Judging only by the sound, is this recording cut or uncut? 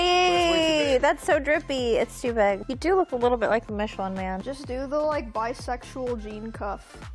cut